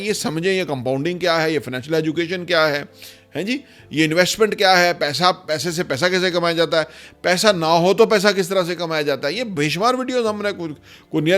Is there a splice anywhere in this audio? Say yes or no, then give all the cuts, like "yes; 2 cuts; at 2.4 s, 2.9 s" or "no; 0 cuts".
no; 0 cuts